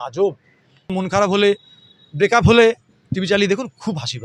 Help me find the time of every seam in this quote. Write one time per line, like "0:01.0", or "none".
0:00.9